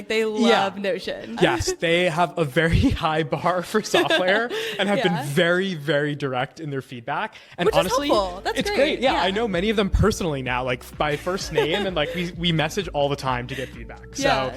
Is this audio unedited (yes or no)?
no